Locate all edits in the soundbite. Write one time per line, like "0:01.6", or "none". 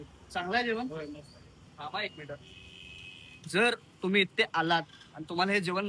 none